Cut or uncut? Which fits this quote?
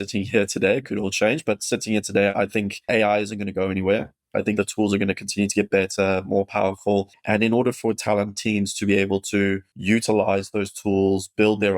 cut